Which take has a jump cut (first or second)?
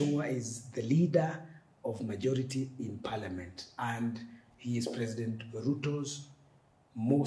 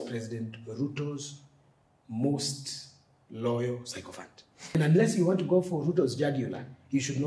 second